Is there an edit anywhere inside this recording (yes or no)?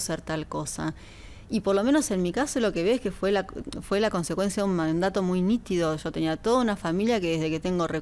no